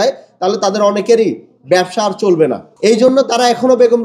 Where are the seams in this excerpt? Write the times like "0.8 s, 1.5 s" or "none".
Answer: 2.7 s